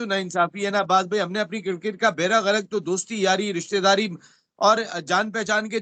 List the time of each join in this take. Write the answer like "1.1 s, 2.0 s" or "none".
none